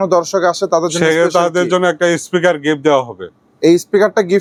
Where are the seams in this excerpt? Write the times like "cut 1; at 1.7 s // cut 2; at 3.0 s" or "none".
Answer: none

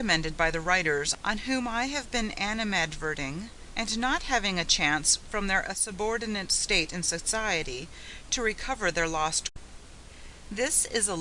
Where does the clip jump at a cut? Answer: none

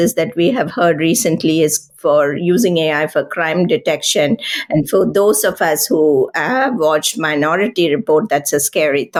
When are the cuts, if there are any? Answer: none

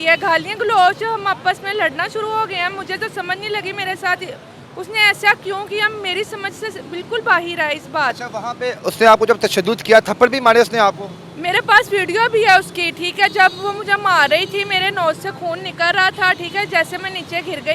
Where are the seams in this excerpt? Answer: none

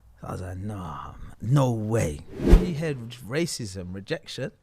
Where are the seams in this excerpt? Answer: cut 1; at 2.5 s

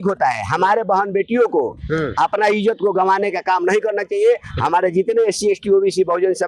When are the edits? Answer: none

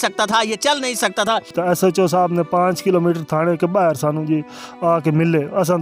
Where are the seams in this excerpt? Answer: cut 1; at 1.5 s

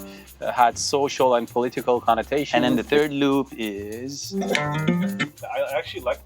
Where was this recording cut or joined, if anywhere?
cut 1; at 2.5 s // cut 2; at 4.3 s

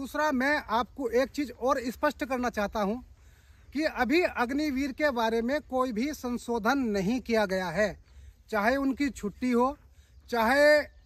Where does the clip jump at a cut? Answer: none

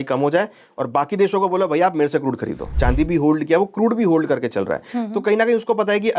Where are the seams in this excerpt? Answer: cut 1; at 2.8 s

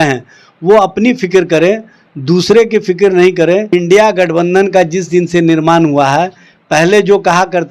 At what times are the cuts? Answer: cut 1; at 3.7 s

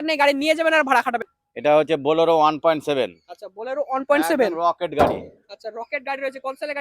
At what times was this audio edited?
cut 1; at 1.4 s

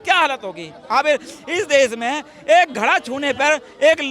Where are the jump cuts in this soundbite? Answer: none

